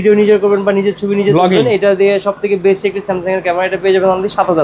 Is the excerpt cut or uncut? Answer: uncut